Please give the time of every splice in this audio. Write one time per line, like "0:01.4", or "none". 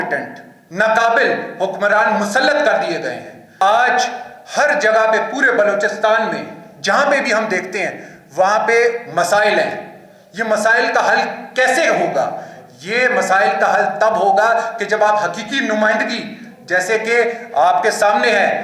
0:03.5